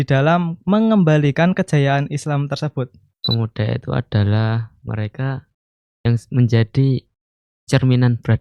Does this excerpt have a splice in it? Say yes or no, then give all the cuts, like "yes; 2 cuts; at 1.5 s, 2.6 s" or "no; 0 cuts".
yes; 1 cut; at 3.2 s